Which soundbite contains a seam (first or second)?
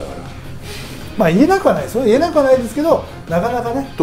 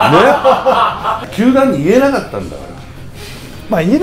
second